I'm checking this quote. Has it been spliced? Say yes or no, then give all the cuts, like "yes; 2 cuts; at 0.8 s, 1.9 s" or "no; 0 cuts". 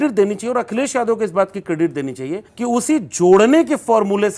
yes; 1 cut; at 2.5 s